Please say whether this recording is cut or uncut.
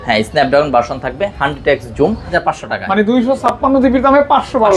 cut